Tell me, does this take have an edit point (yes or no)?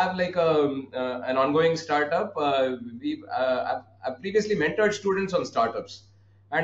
no